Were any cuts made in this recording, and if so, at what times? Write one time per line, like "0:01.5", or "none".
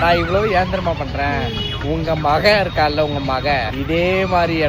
none